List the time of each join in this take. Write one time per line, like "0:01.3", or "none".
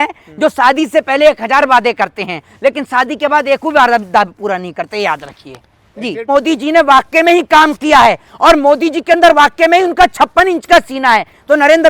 0:06.3